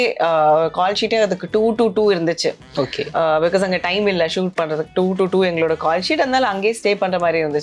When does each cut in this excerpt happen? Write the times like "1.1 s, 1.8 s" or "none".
none